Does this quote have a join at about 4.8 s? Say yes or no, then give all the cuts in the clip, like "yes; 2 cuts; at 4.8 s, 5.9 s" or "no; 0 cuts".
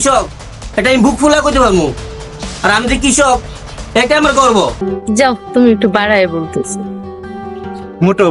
yes; 1 cut; at 4.8 s